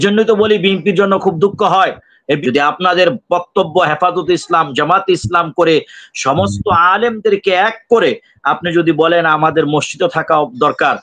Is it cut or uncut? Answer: cut